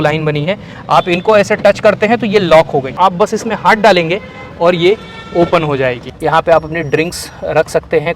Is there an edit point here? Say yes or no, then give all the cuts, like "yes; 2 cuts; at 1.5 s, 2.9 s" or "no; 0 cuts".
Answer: yes; 2 cuts; at 2.9 s, 6.1 s